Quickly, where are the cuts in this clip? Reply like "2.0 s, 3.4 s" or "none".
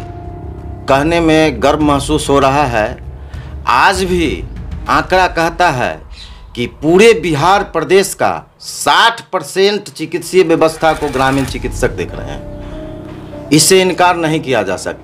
none